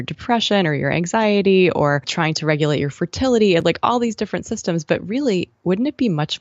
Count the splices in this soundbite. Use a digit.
1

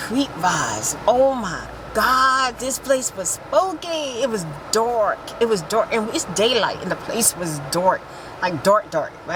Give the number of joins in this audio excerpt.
0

